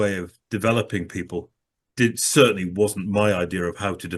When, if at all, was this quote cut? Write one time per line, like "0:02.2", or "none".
none